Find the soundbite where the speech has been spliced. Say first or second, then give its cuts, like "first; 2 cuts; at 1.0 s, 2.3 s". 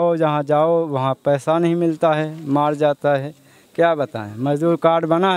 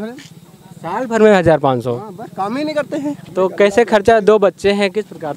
second; 1 cut; at 3.2 s